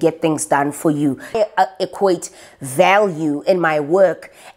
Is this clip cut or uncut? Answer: cut